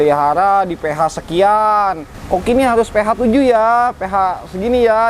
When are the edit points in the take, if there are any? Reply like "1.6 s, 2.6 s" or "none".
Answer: 2.1 s